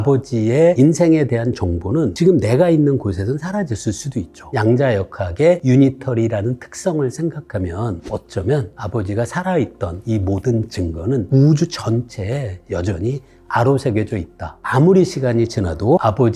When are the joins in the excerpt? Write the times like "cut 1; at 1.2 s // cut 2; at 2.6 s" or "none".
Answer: cut 1; at 4.4 s // cut 2; at 5.6 s // cut 3; at 8.0 s // cut 4; at 14.6 s